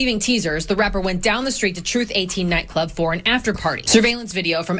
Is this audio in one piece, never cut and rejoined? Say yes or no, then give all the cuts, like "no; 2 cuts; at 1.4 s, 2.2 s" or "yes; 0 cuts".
no; 1 cut; at 3.8 s